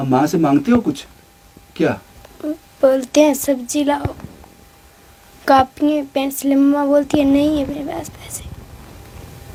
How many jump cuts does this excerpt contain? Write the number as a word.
zero